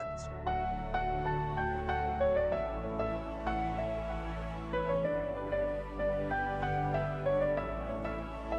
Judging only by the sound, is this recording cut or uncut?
uncut